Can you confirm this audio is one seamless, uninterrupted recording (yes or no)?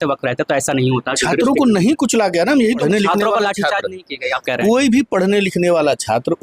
no